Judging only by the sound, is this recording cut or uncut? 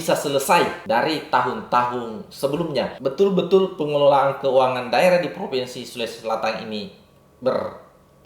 cut